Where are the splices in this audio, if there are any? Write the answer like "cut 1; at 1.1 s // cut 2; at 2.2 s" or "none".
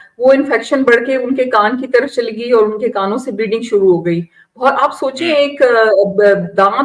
none